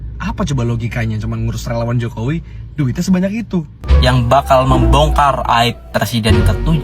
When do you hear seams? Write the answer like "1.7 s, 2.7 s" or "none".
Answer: 3.8 s